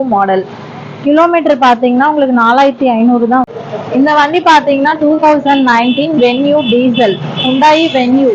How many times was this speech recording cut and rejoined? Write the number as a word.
one